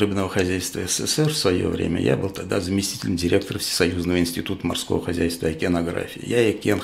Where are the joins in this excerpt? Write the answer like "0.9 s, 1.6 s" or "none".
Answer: none

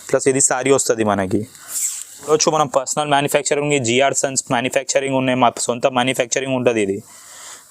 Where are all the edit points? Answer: 2.3 s

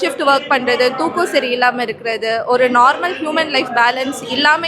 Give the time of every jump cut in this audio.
none

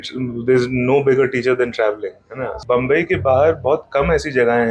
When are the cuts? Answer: 2.6 s

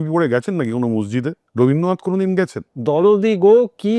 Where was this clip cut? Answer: 1.4 s, 2.7 s

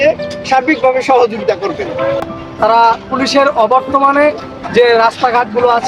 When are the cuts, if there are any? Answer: 2.3 s

